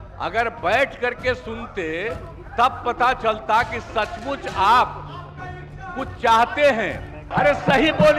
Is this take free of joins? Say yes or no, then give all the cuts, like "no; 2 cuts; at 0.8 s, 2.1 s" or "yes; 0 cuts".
no; 1 cut; at 7.2 s